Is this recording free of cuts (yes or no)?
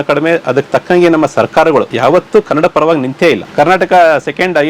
no